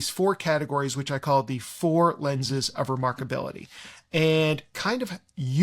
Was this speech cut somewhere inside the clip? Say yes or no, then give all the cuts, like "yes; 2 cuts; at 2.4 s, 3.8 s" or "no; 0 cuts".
no; 0 cuts